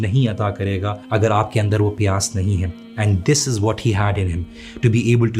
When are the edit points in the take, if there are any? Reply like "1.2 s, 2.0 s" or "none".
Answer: 1.0 s